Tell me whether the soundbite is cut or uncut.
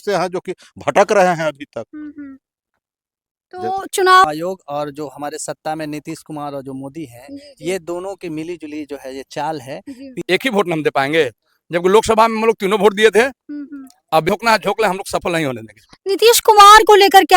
cut